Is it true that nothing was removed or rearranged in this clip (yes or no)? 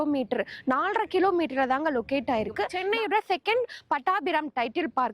no